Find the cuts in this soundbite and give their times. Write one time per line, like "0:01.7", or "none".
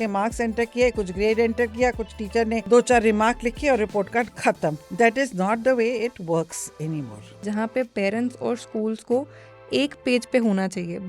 0:02.6
0:04.8
0:07.4